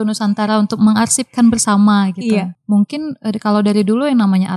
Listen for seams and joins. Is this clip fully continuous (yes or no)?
no